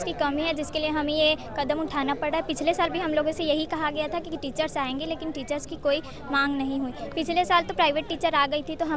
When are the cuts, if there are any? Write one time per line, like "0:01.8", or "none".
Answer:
none